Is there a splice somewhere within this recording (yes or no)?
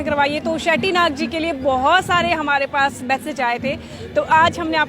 no